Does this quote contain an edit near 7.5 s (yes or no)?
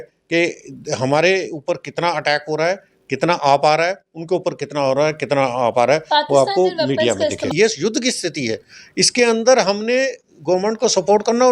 yes